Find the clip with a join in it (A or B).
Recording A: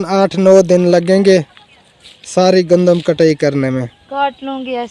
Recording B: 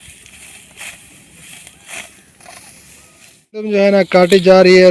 B